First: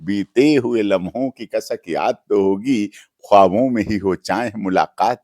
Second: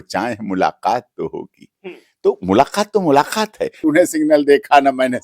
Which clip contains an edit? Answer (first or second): second